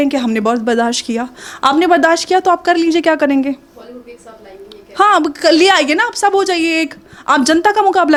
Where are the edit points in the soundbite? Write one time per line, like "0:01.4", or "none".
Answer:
none